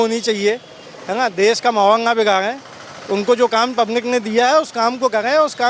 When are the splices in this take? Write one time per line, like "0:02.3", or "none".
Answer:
none

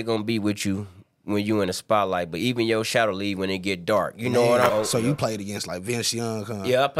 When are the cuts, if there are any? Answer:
0:04.7

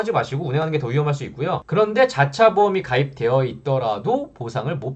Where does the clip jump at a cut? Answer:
0:01.6

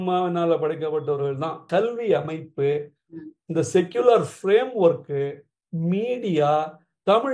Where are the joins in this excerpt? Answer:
0:01.6

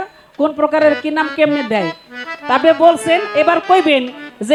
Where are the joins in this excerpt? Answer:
none

